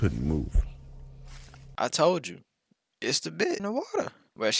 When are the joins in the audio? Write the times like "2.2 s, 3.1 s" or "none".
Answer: 3.7 s